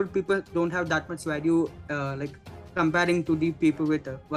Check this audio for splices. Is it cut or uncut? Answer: uncut